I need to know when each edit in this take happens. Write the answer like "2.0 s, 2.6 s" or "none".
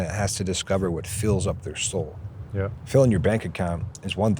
none